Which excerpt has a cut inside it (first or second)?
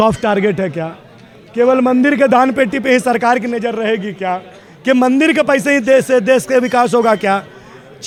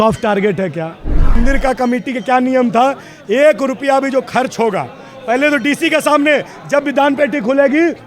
second